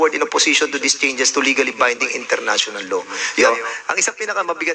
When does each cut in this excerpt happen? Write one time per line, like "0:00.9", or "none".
0:03.5